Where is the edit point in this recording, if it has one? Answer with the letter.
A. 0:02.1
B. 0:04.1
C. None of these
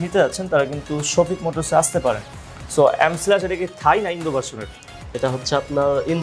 C